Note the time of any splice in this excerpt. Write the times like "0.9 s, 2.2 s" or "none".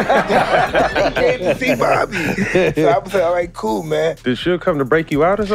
4.2 s